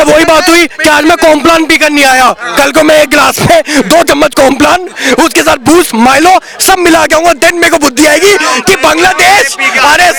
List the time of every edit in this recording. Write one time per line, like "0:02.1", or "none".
none